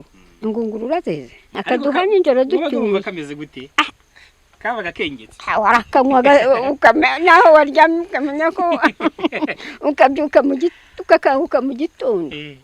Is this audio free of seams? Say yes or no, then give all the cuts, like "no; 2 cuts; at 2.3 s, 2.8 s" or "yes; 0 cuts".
no; 1 cut; at 1.6 s